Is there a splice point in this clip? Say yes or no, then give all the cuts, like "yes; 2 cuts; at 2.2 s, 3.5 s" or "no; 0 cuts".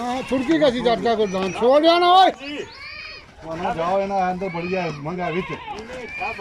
no; 0 cuts